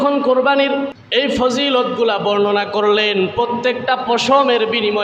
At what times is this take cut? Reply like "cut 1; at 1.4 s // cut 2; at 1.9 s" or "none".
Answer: cut 1; at 1.0 s